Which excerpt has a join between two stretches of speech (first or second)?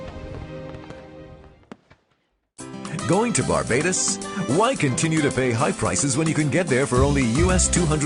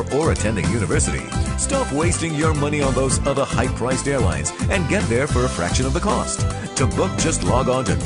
first